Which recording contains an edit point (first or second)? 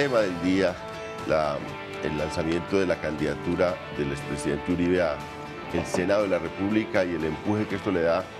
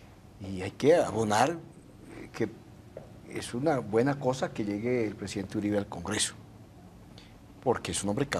second